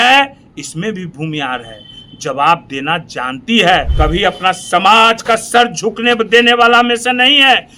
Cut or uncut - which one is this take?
cut